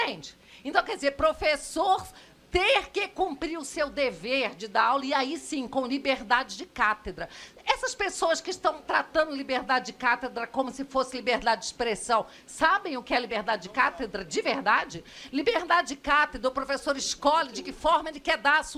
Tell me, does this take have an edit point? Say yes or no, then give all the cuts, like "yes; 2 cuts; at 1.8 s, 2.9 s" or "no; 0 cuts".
no; 0 cuts